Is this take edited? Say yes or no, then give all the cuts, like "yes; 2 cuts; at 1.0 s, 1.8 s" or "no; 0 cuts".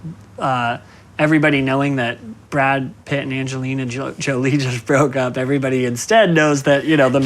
yes; 2 cuts; at 2.3 s, 3.0 s